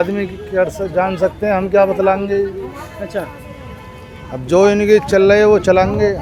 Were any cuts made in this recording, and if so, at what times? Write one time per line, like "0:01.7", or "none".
none